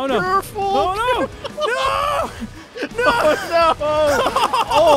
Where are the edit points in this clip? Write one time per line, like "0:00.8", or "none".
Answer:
none